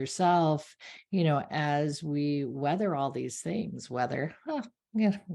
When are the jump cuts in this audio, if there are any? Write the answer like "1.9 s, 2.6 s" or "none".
none